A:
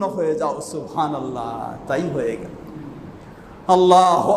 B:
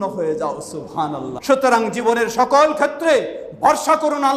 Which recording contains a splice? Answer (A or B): B